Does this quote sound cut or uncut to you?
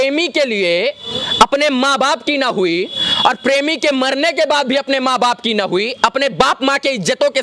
uncut